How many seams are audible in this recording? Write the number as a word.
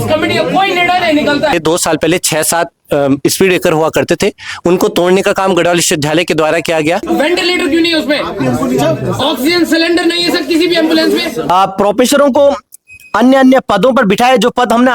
three